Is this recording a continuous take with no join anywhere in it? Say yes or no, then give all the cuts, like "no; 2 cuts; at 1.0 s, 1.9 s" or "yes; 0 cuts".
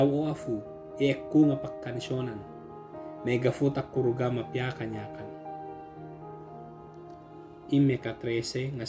no; 2 cuts; at 5.0 s, 7.7 s